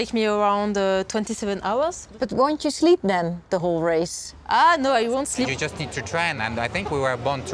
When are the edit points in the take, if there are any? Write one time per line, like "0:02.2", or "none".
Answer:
0:02.0
0:05.5